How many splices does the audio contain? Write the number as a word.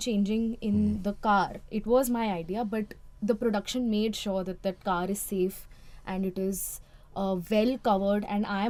zero